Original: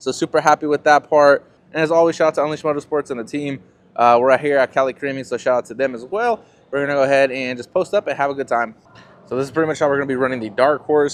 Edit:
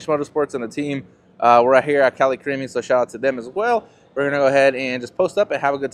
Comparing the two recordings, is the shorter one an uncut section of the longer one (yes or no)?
yes